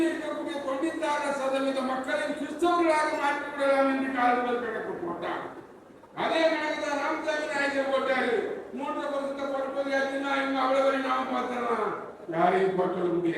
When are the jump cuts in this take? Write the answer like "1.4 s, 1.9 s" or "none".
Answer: none